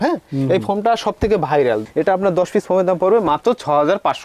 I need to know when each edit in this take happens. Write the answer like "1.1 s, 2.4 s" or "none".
none